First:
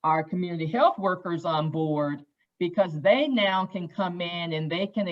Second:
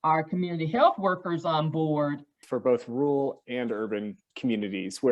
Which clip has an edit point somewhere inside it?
second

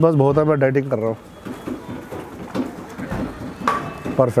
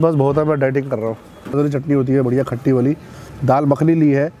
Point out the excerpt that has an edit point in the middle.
second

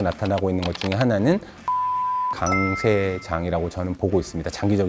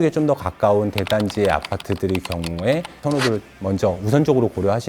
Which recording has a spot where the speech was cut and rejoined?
second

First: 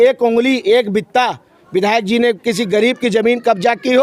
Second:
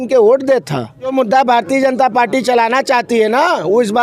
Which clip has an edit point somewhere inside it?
second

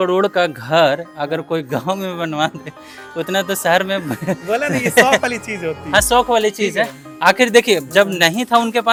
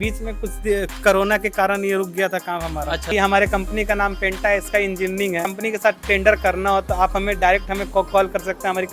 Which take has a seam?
second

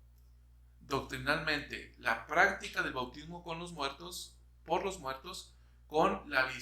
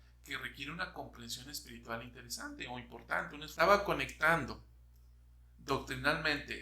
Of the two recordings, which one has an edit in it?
second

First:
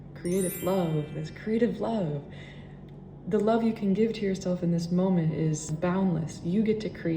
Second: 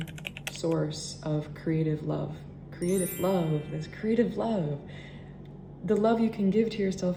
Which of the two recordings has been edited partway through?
first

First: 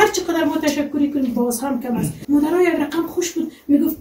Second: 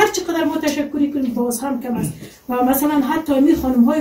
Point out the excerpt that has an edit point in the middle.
first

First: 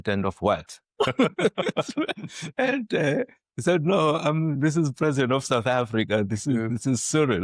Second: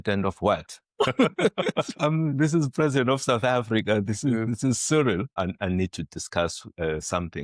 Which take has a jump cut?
second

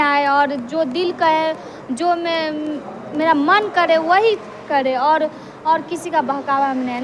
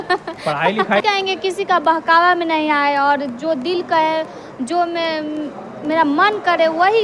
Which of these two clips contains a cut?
second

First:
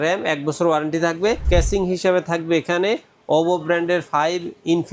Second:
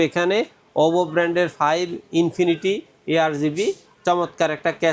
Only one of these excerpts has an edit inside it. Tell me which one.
first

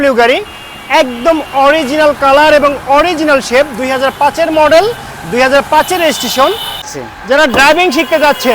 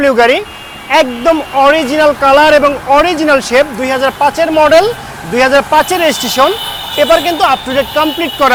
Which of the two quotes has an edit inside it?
first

